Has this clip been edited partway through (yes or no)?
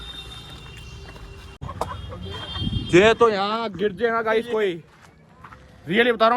yes